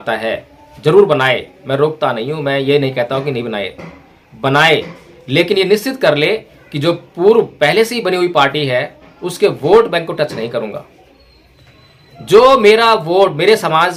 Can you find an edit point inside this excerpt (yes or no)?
no